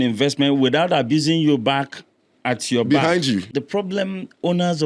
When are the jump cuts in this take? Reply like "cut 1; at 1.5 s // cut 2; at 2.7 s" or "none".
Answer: cut 1; at 3.5 s